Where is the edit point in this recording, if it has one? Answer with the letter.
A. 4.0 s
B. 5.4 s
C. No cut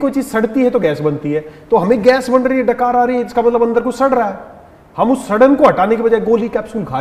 C